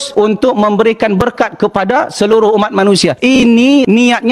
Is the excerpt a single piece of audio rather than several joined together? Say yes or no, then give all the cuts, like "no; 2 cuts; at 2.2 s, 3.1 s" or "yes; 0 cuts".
yes; 0 cuts